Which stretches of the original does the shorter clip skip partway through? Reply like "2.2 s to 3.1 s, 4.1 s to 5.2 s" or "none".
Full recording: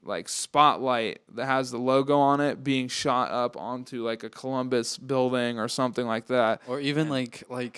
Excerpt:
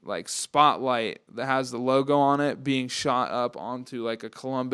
none